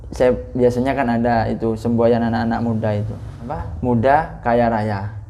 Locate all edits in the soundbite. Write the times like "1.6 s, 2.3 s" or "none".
3.4 s